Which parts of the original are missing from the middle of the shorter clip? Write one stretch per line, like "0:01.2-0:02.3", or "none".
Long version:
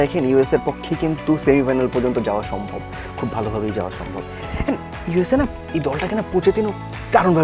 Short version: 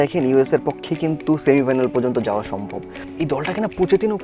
0:03.1-0:05.6